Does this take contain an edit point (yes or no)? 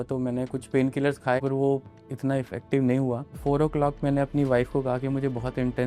yes